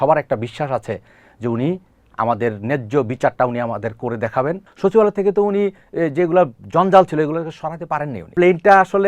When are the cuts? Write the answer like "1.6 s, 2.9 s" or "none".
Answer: 4.7 s, 8.2 s